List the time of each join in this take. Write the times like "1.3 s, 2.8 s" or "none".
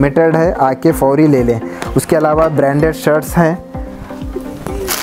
none